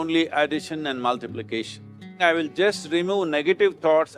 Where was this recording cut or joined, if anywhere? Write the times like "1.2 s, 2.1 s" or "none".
2.2 s